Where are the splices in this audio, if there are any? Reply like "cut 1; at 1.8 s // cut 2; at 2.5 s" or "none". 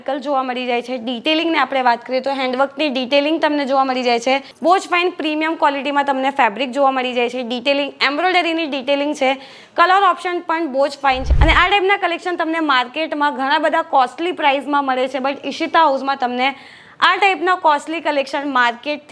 cut 1; at 4.5 s // cut 2; at 11.3 s